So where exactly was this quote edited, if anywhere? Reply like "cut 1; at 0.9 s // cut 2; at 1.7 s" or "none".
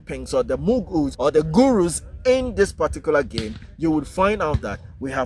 cut 1; at 1.1 s